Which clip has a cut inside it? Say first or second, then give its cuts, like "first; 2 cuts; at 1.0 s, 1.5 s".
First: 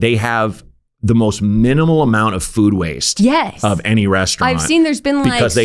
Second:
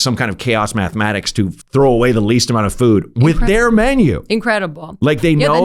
second; 1 cut; at 1.6 s